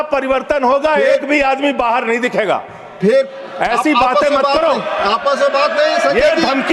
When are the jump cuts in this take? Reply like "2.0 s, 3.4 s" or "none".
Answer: none